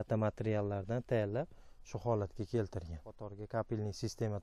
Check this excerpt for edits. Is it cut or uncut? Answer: cut